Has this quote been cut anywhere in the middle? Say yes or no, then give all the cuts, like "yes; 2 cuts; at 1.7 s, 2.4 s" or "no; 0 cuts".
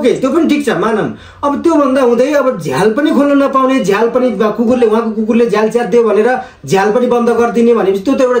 no; 0 cuts